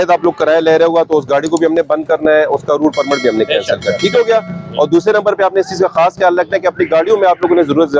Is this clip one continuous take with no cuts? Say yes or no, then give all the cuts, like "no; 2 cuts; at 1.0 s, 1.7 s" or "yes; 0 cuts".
yes; 0 cuts